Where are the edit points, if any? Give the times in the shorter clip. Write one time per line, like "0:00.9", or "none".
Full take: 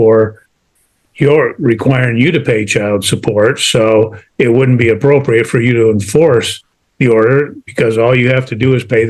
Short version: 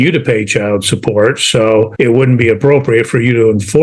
0:01.9